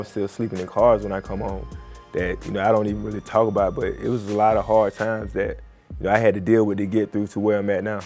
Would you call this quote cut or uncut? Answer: uncut